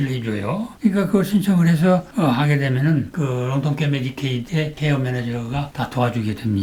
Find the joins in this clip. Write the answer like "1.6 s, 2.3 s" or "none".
none